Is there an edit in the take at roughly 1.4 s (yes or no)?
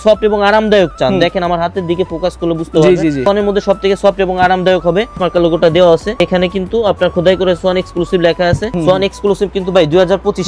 no